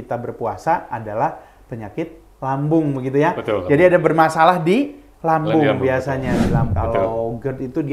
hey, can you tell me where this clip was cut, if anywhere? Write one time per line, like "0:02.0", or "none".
0:06.7

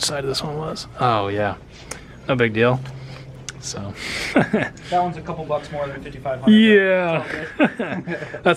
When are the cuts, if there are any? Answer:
none

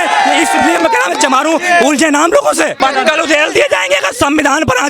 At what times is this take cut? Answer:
0:02.8

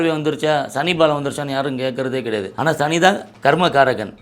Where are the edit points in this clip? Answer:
0:02.5
0:03.3

